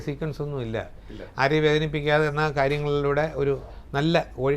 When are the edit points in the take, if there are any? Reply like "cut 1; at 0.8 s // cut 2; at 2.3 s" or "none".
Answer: none